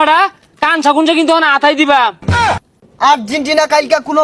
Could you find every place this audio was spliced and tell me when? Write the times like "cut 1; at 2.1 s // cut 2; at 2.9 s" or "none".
cut 1; at 2.6 s